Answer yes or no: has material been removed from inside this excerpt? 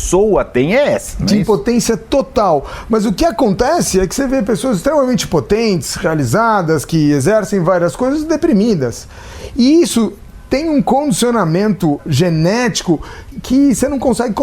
yes